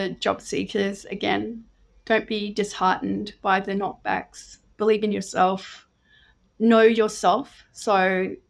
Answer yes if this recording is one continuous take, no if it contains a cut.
yes